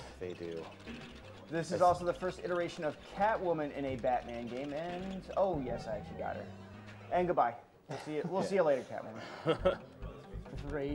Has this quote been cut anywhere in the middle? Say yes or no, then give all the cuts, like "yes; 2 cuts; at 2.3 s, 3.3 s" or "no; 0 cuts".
no; 0 cuts